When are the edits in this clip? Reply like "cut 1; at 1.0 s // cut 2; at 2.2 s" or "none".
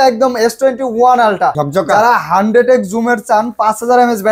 cut 1; at 1.6 s